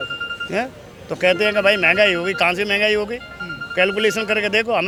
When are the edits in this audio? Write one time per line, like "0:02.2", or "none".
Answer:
none

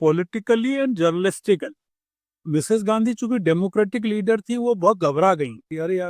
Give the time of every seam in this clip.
0:02.4

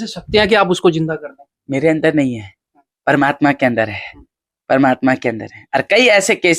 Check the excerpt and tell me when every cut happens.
none

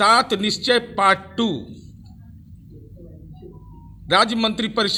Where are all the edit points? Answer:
none

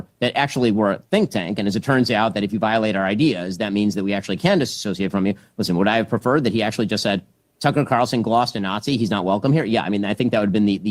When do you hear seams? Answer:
none

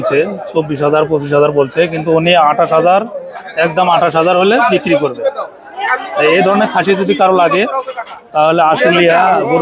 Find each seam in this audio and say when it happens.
none

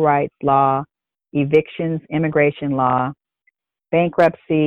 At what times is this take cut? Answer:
none

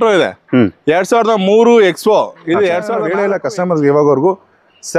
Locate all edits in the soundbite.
0:03.0

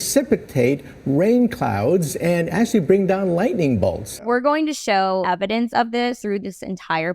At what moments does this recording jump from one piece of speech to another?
0:04.1
0:05.2
0:06.2

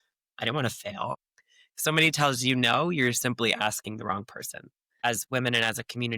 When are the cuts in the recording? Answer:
0:01.2
0:05.0

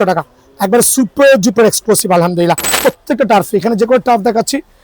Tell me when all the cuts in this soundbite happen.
0:02.8

